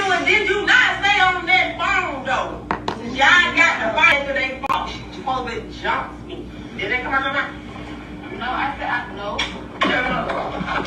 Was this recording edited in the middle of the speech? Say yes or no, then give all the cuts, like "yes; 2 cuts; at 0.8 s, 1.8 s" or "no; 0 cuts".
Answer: no; 0 cuts